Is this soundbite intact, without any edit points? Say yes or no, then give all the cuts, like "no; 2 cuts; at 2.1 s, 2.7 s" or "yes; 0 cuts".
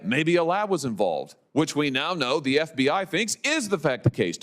no; 1 cut; at 1.4 s